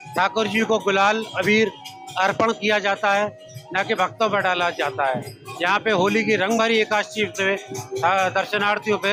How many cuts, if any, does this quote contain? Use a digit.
0